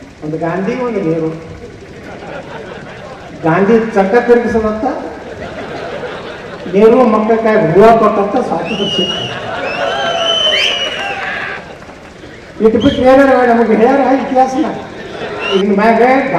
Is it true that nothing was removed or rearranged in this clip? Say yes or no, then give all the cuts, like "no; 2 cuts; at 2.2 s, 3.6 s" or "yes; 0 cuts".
no; 1 cut; at 15.5 s